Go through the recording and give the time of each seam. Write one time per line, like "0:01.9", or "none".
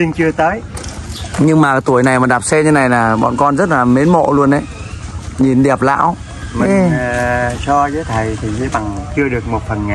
none